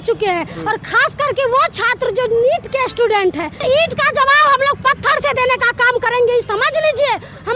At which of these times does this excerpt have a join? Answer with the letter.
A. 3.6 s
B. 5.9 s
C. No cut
A